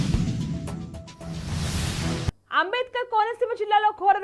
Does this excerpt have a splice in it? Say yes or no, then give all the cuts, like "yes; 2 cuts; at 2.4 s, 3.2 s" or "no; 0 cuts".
yes; 1 cut; at 2.4 s